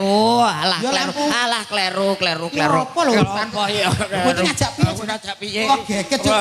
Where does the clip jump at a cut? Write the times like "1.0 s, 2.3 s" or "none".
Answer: none